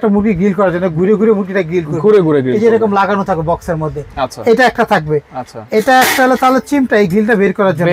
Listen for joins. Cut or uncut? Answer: uncut